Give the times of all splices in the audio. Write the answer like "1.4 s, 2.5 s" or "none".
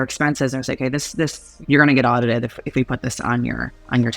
1.5 s